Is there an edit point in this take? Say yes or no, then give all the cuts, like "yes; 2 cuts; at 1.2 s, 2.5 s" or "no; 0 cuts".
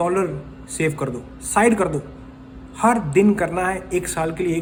no; 0 cuts